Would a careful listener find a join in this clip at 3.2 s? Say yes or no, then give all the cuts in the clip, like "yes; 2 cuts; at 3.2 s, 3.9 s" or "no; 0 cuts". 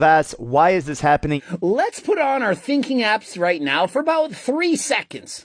no; 1 cut; at 1.4 s